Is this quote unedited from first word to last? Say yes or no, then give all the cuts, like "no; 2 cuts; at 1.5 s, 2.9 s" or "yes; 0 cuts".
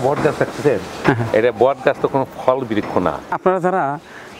no; 1 cut; at 3.4 s